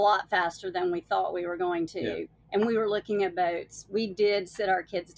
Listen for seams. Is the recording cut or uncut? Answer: uncut